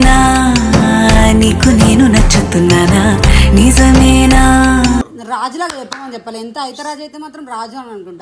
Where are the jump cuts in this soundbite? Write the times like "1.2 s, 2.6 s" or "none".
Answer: 5.1 s